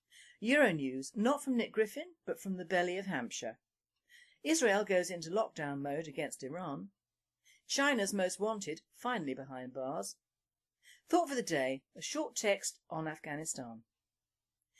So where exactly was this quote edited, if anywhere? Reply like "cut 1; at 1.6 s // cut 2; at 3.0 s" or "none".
cut 1; at 9.5 s